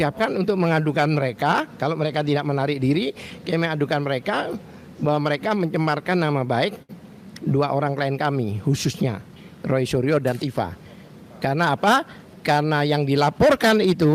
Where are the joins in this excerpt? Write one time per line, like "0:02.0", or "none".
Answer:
none